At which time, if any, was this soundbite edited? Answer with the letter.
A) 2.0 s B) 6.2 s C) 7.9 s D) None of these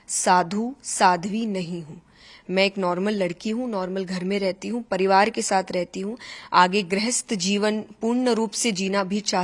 D